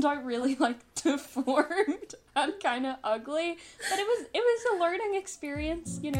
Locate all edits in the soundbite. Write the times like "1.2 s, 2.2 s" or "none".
none